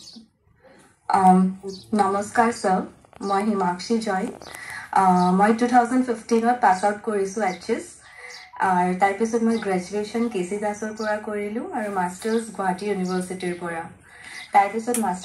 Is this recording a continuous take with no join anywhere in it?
yes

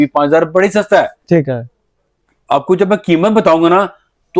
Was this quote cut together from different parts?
no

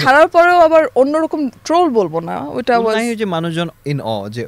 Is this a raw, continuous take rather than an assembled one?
yes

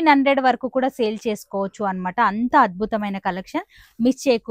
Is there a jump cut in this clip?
no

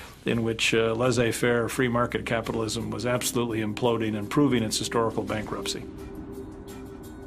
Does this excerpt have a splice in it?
no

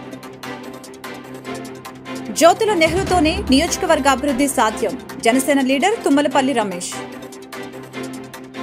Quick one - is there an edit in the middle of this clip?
yes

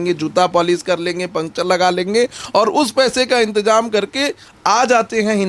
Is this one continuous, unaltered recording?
no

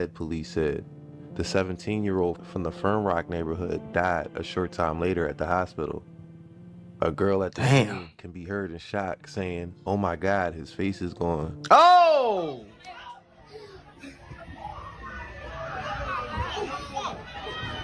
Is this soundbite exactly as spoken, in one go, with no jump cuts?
yes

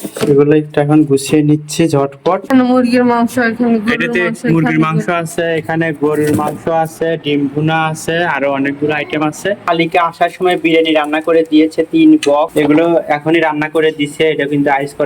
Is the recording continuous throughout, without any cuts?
no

